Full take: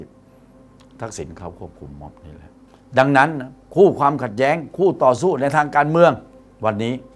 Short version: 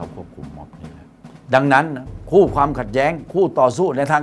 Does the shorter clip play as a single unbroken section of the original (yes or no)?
yes